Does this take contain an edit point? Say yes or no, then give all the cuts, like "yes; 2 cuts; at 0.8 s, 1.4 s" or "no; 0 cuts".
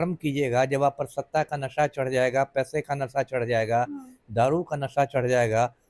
no; 0 cuts